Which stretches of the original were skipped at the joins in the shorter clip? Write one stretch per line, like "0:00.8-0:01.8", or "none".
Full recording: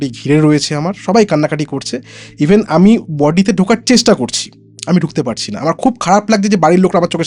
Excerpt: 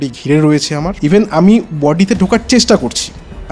0:00.9-0:02.3